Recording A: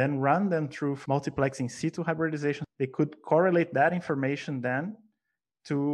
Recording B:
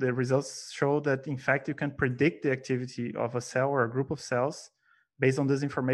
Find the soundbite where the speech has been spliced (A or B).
A